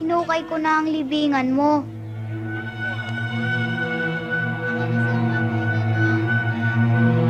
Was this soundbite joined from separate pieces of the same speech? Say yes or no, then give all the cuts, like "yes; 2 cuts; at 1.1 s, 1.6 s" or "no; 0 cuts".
no; 0 cuts